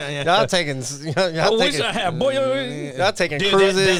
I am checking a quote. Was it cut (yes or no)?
no